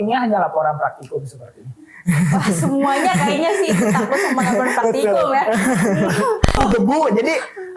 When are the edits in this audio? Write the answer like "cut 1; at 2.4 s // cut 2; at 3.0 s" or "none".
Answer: cut 1; at 6.6 s